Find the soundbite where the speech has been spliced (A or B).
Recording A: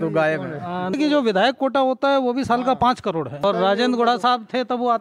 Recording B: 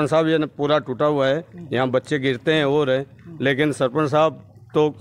A